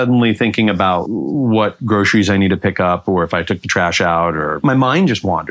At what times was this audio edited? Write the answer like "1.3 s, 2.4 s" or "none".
1.0 s, 4.6 s

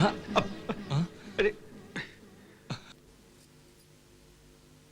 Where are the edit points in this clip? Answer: none

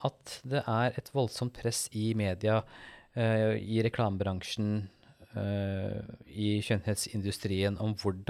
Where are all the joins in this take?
none

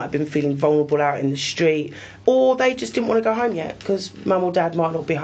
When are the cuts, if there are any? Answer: 2.1 s

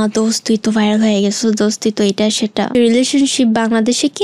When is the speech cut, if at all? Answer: 2.7 s

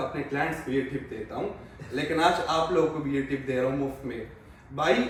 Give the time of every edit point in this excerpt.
none

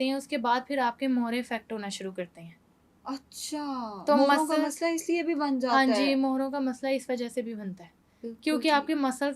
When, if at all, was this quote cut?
none

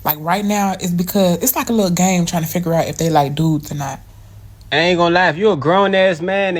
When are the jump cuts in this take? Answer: 4.5 s

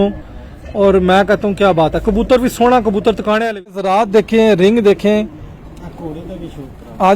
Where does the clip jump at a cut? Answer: 3.9 s

